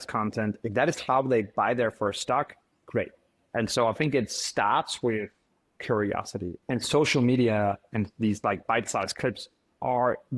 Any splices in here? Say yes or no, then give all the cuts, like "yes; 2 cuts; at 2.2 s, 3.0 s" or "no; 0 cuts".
yes; 2 cuts; at 3.3 s, 6.6 s